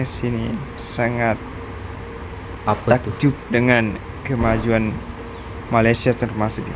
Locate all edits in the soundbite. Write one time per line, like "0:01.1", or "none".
none